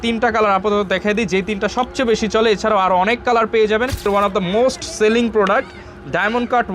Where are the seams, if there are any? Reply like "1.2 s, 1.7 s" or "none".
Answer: 4.0 s